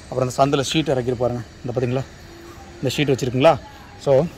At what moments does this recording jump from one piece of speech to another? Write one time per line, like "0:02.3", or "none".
none